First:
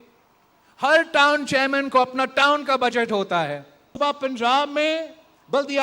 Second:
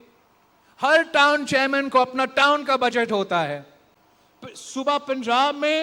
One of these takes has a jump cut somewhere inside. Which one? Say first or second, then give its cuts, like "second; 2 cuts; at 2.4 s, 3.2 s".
first; 1 cut; at 3.8 s